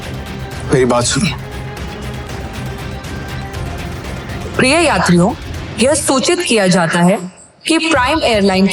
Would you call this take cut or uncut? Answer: cut